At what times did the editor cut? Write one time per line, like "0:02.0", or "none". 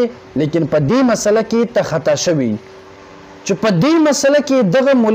0:02.8